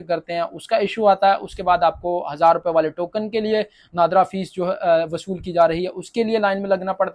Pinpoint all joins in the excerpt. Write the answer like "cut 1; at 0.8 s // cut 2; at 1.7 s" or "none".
none